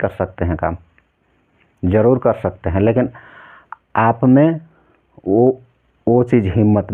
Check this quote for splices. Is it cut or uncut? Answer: uncut